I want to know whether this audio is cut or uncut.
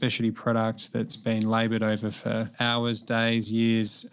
cut